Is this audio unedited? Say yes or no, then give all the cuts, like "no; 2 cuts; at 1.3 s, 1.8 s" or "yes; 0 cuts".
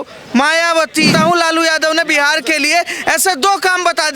no; 1 cut; at 1.1 s